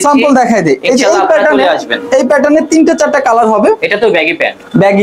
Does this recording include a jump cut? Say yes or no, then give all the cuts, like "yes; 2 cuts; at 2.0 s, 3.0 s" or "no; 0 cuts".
no; 0 cuts